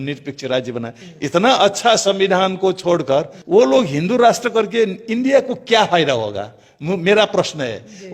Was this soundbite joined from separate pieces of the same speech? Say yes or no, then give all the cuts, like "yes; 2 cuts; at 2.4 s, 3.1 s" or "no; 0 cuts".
yes; 1 cut; at 1.0 s